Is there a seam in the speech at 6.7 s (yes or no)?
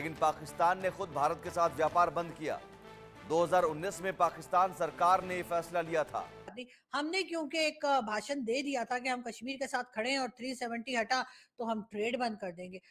yes